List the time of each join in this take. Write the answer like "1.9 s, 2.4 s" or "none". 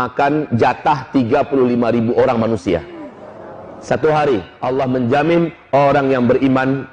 4.5 s